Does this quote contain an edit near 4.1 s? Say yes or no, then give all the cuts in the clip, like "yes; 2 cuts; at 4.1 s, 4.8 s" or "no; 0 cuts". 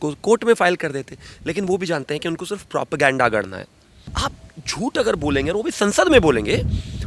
yes; 1 cut; at 4.1 s